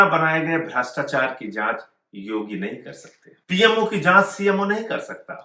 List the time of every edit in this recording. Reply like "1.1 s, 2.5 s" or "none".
3.6 s